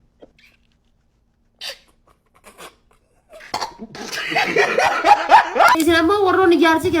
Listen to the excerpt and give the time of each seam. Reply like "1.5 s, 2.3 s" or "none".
5.7 s